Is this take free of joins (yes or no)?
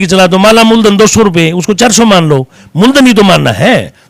yes